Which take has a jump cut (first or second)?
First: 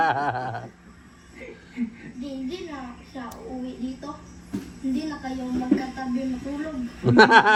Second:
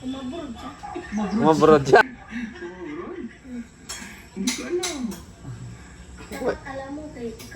second